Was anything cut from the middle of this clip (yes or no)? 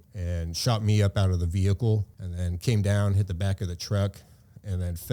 yes